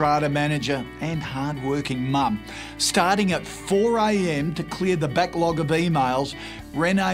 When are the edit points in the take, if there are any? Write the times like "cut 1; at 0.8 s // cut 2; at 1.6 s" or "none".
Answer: cut 1; at 4.2 s